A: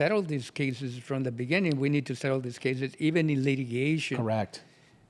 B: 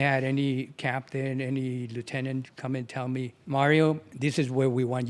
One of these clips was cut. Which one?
B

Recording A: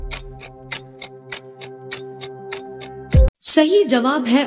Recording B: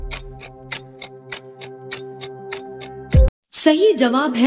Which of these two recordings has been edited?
A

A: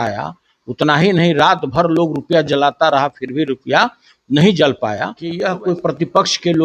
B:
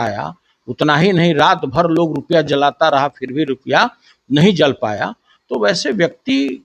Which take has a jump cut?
A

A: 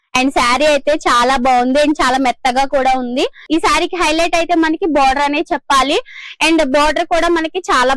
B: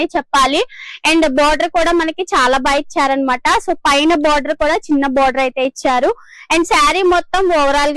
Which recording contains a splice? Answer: A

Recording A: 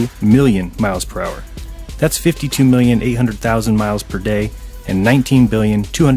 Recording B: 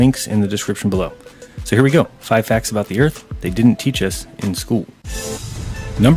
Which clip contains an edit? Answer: A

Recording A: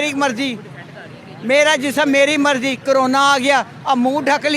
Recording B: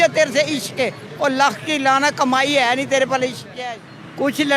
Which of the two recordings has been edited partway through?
B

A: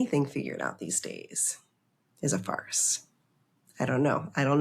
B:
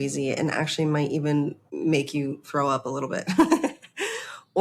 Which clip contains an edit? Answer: B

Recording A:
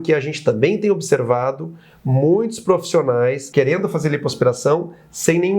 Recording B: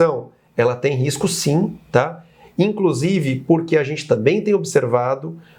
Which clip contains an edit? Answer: A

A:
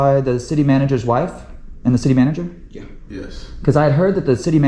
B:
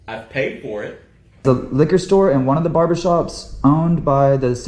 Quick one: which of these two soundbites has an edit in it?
B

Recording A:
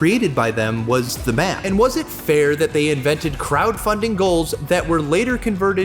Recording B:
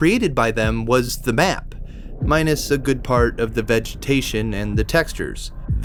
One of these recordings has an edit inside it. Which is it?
A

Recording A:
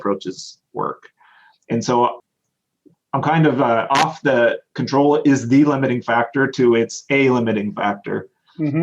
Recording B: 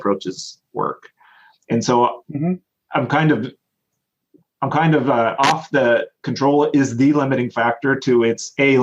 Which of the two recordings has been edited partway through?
A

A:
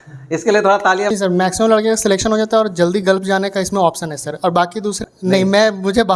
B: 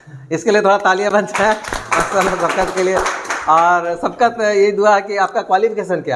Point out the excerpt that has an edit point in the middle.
A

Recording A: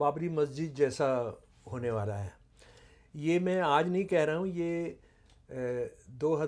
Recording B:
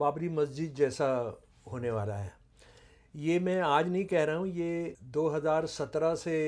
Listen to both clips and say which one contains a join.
B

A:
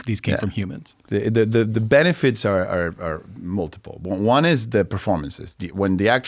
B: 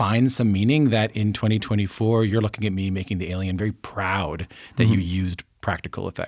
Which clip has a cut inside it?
A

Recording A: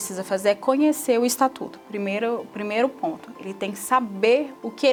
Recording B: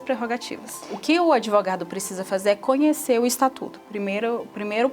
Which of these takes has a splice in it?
B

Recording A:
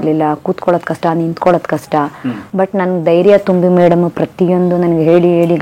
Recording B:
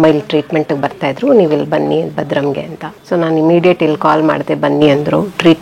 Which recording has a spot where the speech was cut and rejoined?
B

